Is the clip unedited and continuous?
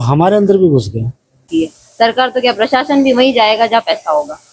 no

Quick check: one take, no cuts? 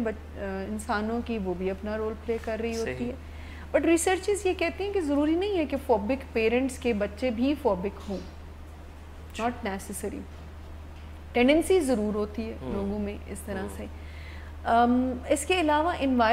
yes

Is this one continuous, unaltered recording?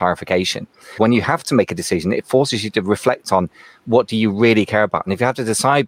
no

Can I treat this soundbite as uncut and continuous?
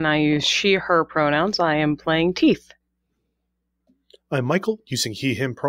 yes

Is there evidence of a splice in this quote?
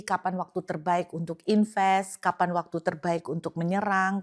no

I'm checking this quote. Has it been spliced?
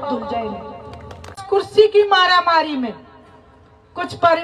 yes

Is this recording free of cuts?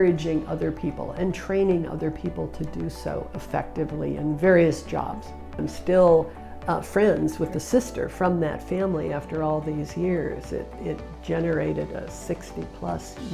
no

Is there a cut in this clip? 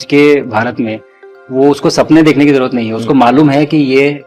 no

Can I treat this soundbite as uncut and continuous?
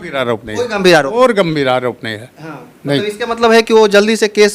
yes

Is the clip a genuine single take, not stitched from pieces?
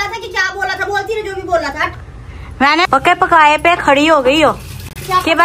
no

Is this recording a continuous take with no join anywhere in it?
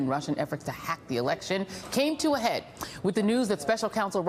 no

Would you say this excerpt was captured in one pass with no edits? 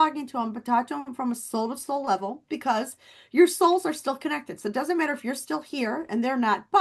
yes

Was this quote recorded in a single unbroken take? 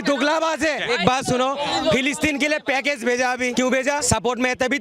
no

